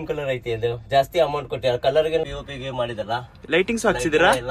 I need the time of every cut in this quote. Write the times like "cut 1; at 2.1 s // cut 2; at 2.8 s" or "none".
cut 1; at 2.2 s

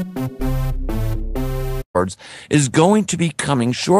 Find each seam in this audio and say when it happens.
cut 1; at 1.8 s

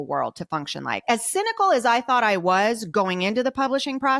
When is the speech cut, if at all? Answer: cut 1; at 1.1 s

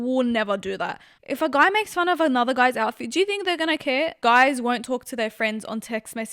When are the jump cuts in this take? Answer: cut 1; at 1.1 s // cut 2; at 4.2 s

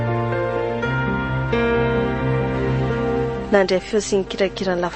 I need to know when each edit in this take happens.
cut 1; at 3.4 s

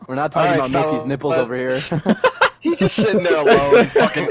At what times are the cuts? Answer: cut 1; at 2.6 s

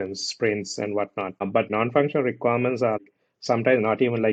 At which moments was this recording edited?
cut 1; at 1.6 s // cut 2; at 3.0 s

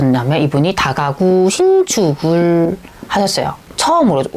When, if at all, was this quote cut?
none

